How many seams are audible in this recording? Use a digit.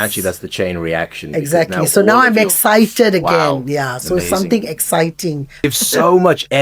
1